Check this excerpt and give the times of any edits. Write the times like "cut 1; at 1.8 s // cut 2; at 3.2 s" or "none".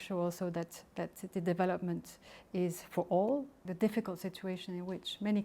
cut 1; at 3.6 s